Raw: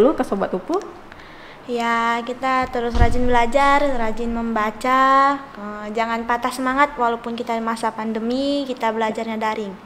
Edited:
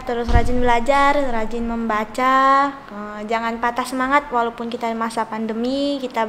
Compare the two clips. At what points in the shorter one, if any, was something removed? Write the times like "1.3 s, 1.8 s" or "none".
none